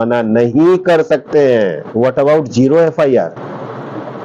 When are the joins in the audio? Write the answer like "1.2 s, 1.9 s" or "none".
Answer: 1.9 s